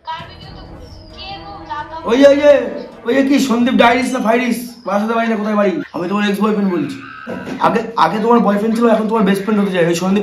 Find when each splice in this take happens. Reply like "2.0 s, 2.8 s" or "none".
5.9 s, 7.4 s